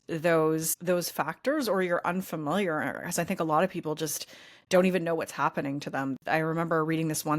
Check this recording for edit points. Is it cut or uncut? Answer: cut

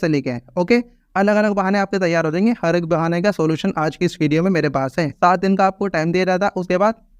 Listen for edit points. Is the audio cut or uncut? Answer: cut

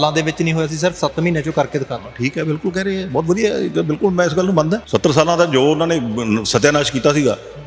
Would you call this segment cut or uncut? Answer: cut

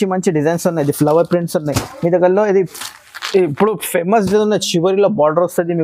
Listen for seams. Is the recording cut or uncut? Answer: uncut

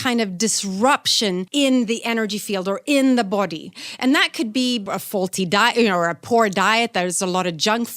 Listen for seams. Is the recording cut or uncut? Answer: cut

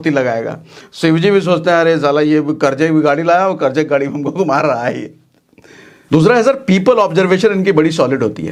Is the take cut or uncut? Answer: uncut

